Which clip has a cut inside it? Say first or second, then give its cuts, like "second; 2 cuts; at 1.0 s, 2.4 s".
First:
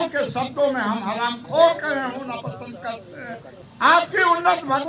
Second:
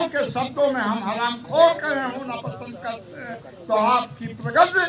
first; 1 cut; at 3.5 s